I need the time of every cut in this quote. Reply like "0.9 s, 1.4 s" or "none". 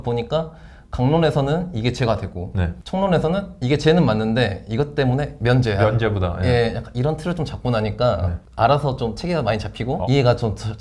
2.8 s, 8.4 s, 10.0 s

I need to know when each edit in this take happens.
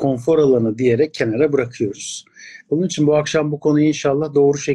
none

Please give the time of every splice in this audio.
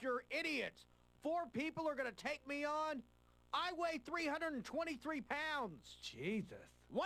none

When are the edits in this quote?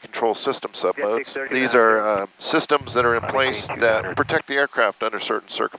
1.4 s, 4.1 s

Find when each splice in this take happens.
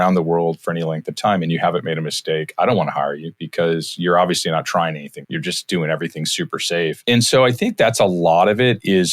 5.2 s, 7.0 s

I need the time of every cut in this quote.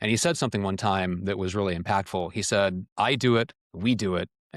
2.8 s, 3.6 s

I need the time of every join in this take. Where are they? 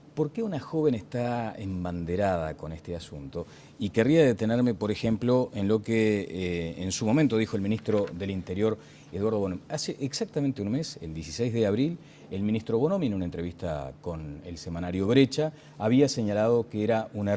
16.0 s

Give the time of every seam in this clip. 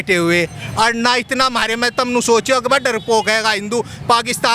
none

